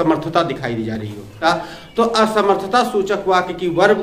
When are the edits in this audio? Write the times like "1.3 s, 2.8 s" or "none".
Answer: 1.4 s